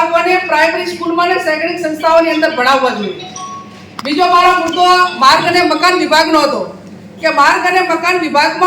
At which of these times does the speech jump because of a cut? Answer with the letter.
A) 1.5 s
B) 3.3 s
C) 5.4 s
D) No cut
D